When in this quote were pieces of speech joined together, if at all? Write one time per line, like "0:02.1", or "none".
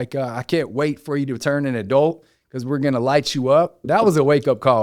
0:03.8